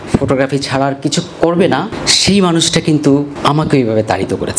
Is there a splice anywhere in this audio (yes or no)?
yes